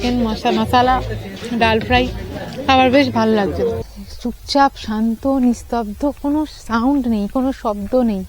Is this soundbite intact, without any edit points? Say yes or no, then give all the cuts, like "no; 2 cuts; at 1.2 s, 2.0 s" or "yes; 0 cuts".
no; 1 cut; at 3.8 s